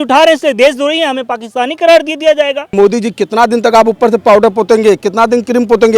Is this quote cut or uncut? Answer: cut